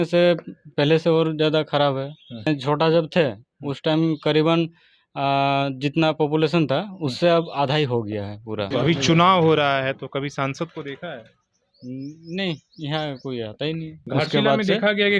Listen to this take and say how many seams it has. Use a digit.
3